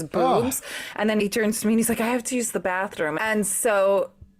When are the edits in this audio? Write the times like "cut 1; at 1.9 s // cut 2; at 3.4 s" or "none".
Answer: cut 1; at 1.1 s // cut 2; at 3.2 s